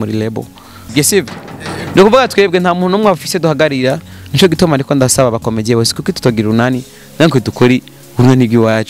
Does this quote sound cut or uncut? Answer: cut